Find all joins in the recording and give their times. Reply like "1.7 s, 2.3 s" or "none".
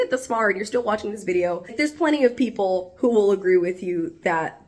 1.7 s